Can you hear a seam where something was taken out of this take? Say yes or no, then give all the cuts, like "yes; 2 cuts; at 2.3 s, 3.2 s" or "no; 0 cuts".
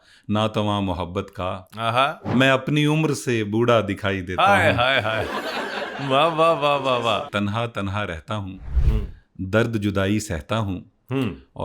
yes; 2 cuts; at 2.3 s, 7.0 s